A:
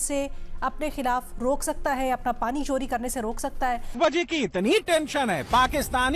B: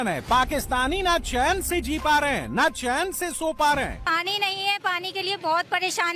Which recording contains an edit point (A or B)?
A